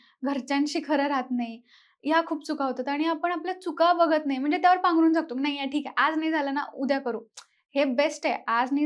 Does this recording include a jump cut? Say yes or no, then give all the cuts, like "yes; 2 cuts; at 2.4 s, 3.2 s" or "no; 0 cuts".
no; 0 cuts